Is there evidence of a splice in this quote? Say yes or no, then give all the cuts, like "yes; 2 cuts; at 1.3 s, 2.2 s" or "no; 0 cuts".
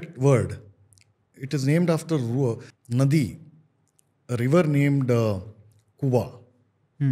yes; 1 cut; at 2.7 s